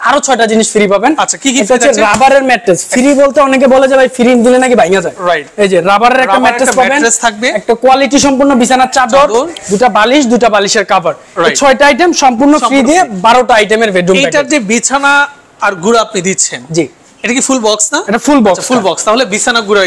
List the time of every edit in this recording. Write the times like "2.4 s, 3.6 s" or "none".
none